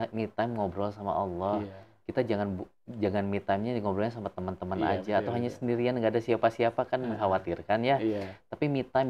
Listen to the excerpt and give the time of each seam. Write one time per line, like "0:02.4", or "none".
none